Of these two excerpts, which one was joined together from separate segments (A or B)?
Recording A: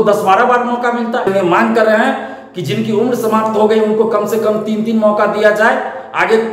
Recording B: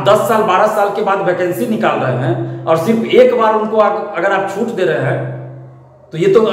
A